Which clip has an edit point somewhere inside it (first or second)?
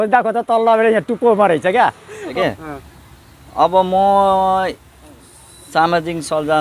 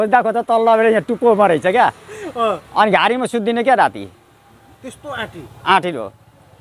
first